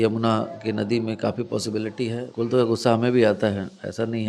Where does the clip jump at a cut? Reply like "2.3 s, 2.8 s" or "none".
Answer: 2.2 s